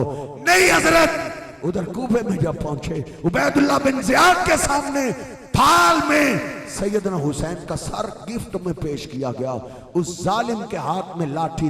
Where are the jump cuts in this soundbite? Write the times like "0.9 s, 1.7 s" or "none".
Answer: 1.5 s